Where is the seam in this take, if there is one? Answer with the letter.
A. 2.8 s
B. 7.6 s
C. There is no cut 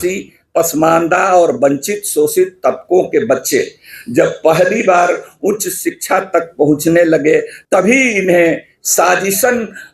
B